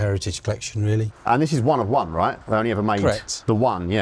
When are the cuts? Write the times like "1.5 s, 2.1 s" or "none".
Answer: 1.1 s